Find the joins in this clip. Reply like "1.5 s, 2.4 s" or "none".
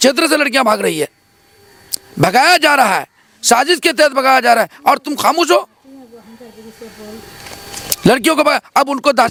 none